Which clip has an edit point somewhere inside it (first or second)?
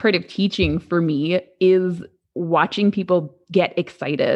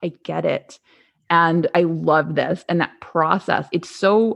second